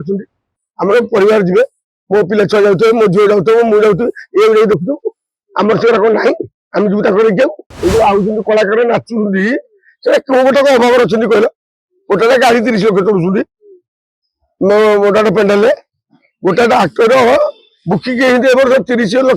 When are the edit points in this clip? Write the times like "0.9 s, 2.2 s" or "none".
7.7 s